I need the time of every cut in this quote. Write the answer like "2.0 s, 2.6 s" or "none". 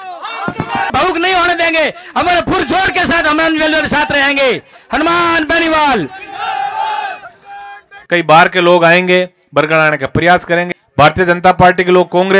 0.9 s, 7.9 s, 10.7 s